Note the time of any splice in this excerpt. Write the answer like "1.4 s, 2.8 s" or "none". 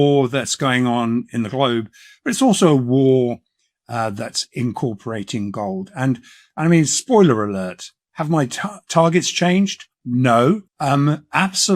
10.7 s